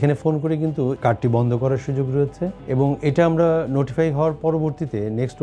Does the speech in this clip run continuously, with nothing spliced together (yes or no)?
no